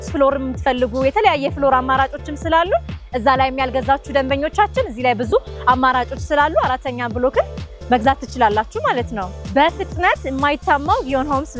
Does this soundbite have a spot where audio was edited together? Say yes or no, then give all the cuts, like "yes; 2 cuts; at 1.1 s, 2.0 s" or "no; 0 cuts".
yes; 1 cut; at 9.3 s